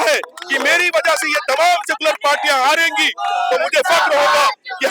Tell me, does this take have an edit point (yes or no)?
no